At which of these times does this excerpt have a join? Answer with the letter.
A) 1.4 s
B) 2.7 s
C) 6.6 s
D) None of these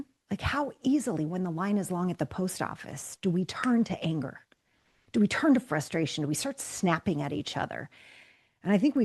D